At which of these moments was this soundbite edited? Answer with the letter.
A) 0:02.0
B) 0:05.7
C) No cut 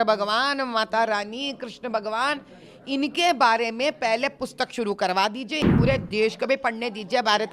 B